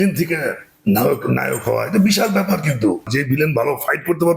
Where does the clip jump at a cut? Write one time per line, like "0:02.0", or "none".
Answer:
0:03.1